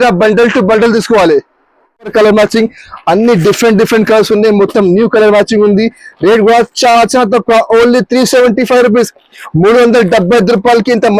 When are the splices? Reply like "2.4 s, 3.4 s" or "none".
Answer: 2.1 s